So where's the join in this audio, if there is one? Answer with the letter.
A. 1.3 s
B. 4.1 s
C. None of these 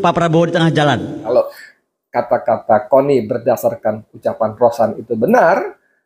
A